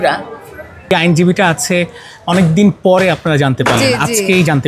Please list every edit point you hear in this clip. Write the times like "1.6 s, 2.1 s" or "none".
0.9 s